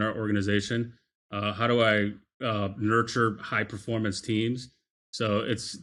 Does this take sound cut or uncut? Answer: uncut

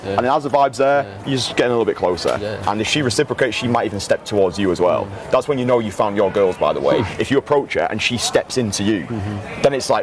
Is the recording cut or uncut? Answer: uncut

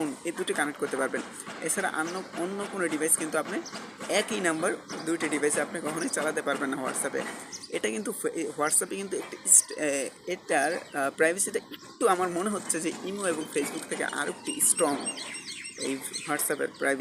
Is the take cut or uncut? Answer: cut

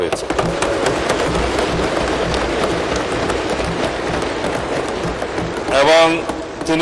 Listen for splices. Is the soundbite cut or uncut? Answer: uncut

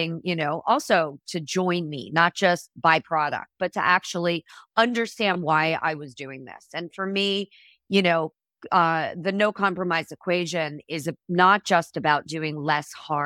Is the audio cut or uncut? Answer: uncut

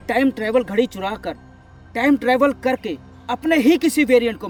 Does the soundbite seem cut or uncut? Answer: uncut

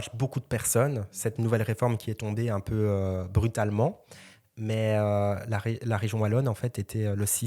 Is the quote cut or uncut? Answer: uncut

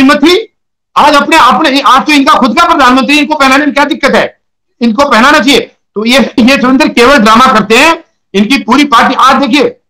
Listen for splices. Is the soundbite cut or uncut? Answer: uncut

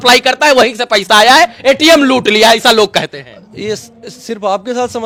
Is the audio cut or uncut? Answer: uncut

